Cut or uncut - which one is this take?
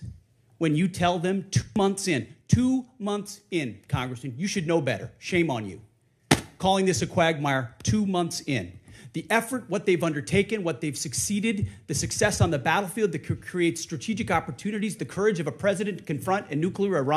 uncut